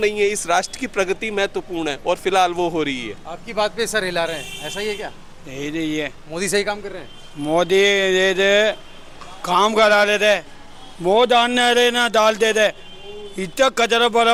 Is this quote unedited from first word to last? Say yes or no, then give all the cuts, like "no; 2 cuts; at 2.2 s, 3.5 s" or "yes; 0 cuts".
yes; 0 cuts